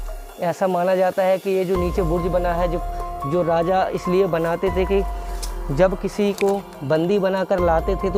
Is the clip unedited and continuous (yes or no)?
yes